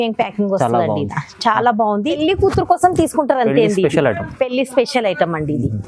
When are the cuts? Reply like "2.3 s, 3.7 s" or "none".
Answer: 2.2 s

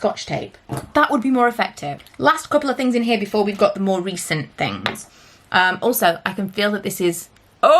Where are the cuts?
none

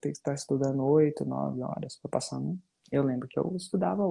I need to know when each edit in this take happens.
2.7 s

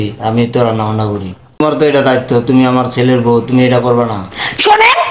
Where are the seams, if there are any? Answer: 1.6 s

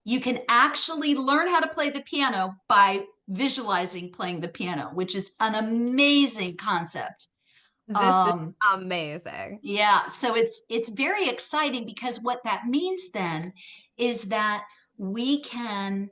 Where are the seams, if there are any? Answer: none

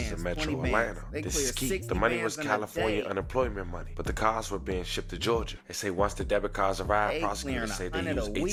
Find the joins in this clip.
none

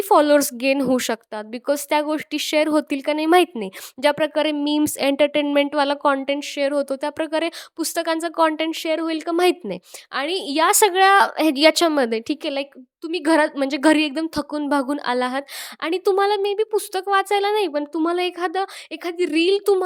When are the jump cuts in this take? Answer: none

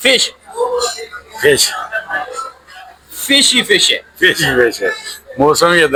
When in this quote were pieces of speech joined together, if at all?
none

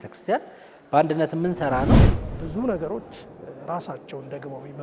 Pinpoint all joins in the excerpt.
2.0 s

